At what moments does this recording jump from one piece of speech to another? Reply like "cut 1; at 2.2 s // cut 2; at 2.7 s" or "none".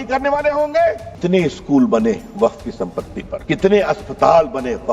cut 1; at 1.1 s // cut 2; at 3.4 s